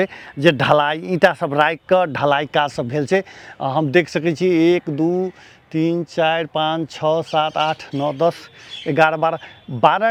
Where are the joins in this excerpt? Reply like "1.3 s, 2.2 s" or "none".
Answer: none